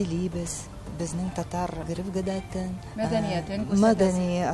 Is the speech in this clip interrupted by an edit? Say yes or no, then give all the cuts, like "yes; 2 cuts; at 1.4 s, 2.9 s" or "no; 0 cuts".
yes; 2 cuts; at 1.8 s, 2.8 s